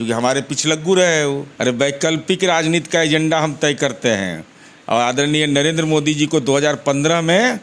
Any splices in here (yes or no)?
yes